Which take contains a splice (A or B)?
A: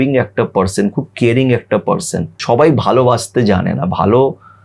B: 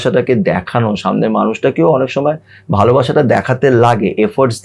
A